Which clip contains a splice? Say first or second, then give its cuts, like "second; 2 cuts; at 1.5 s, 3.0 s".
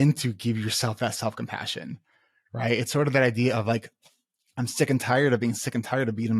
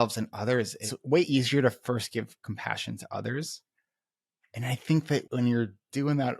second; 2 cuts; at 0.9 s, 5.3 s